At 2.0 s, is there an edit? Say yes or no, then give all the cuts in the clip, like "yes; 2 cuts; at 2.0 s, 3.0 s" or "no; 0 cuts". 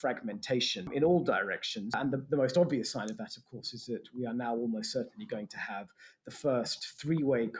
yes; 2 cuts; at 0.9 s, 2.0 s